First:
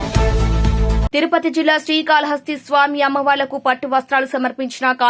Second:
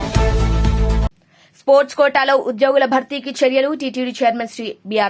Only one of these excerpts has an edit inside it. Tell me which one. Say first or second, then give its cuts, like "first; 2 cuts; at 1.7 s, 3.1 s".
first; 1 cut; at 0.9 s